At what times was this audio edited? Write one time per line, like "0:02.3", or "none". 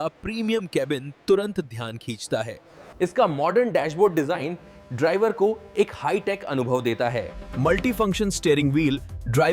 0:02.9
0:07.4